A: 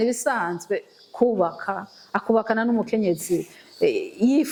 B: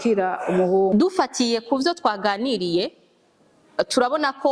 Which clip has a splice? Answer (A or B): B